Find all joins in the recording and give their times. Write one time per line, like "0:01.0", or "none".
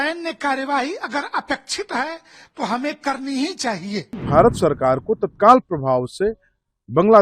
0:04.2